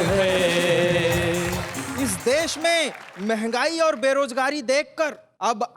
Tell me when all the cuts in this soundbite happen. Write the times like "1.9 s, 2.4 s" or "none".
1.8 s